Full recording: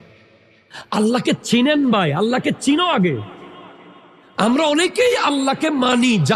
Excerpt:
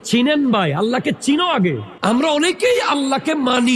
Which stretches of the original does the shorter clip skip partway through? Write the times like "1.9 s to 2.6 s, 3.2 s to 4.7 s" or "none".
3.3 s to 4.2 s